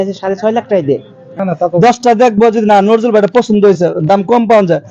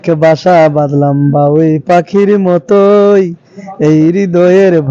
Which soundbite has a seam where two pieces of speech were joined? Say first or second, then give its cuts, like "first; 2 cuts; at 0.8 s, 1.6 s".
first; 1 cut; at 1.4 s